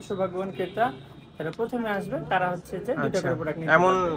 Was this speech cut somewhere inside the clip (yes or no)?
no